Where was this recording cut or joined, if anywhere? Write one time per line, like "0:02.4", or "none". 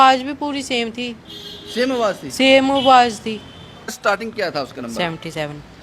0:04.0